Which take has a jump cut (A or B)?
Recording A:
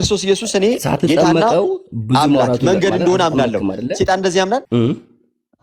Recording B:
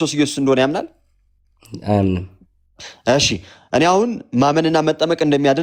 A